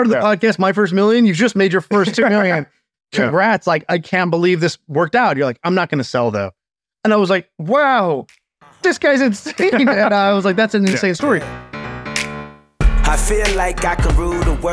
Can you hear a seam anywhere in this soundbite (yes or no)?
yes